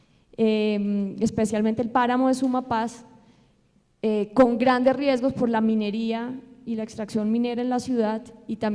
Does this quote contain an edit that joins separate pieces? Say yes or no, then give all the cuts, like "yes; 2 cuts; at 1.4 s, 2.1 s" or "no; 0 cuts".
yes; 1 cut; at 4.4 s